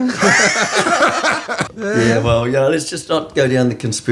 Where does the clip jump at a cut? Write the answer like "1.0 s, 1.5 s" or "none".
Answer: 1.7 s